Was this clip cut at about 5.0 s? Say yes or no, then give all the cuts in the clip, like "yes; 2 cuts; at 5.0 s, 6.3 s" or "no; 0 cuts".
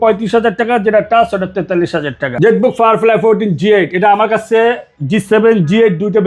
no; 1 cut; at 2.2 s